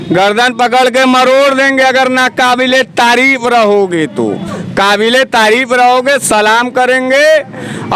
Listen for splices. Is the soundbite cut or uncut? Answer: uncut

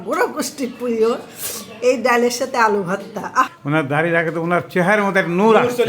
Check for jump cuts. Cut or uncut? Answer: cut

